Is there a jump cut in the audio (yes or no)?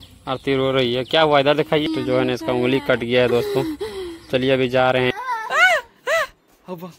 yes